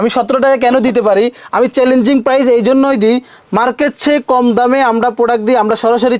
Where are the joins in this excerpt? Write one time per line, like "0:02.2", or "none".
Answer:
none